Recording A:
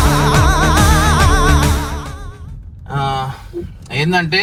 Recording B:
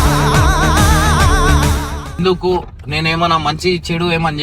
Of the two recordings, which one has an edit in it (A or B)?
B